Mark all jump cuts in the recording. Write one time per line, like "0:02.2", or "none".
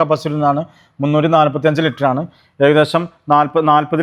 none